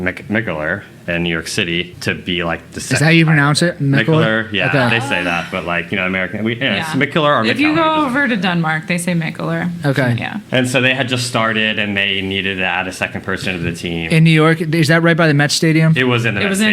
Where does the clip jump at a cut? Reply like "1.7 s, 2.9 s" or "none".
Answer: 1.9 s